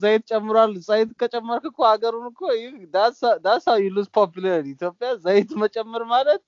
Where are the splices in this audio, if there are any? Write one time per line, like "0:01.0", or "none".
none